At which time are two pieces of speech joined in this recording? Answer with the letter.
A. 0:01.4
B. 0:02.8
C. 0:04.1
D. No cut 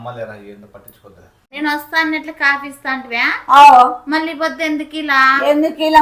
A